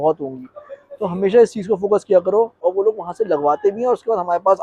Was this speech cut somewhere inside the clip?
yes; 1 cut; at 2.6 s

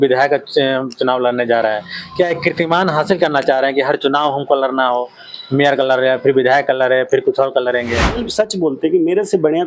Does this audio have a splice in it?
yes; 1 cut; at 8.3 s

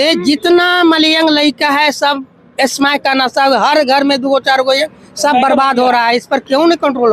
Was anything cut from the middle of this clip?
no; 0 cuts

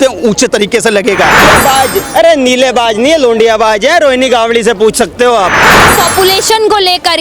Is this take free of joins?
no; 2 cuts; at 1.5 s, 5.9 s

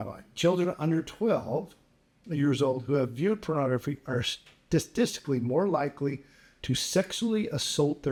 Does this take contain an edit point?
no; 0 cuts

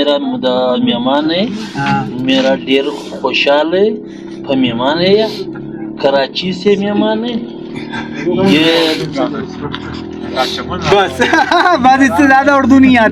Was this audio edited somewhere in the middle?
no; 0 cuts

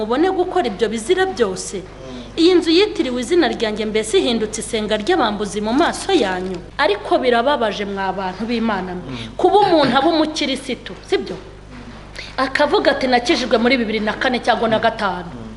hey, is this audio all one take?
no; 1 cut; at 6.6 s

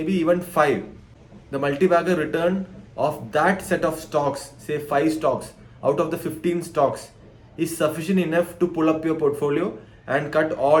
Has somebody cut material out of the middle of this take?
no; 0 cuts

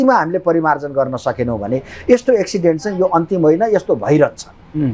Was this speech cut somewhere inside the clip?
no; 0 cuts

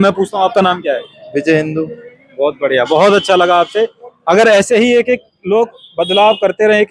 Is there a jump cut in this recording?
no; 0 cuts

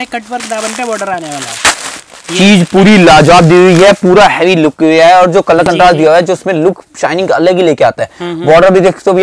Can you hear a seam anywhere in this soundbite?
no; 0 cuts

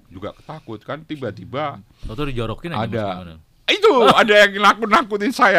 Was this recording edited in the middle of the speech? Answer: no; 0 cuts

